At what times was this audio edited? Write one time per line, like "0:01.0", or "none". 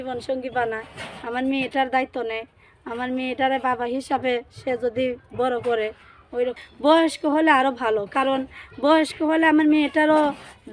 0:06.7